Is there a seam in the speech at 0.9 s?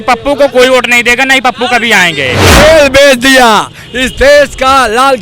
no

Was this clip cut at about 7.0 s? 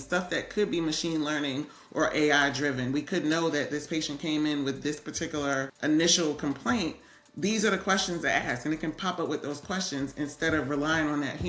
no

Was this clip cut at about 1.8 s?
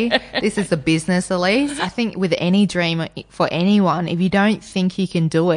yes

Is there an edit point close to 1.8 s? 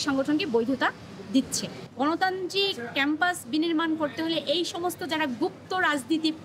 yes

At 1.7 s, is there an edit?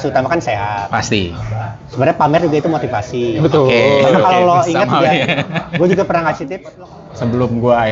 no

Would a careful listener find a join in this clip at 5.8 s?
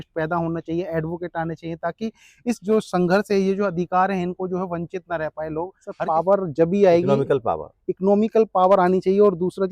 yes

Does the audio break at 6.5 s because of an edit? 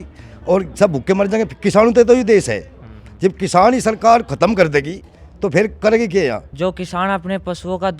yes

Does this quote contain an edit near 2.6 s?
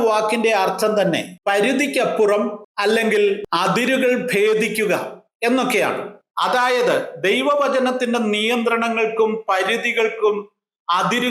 yes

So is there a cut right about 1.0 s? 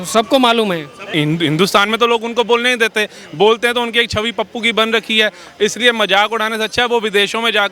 yes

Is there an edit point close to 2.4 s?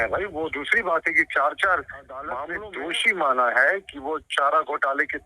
yes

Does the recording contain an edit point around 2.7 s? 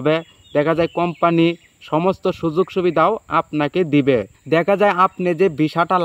no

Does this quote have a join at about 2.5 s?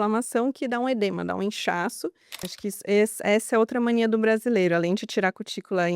yes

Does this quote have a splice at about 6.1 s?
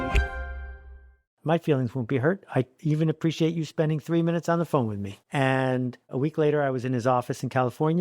yes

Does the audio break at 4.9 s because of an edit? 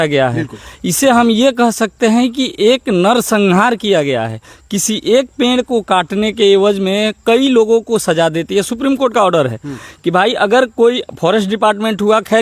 no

